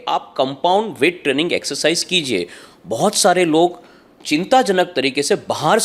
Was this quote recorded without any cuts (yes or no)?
yes